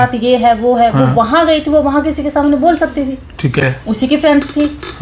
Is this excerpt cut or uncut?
uncut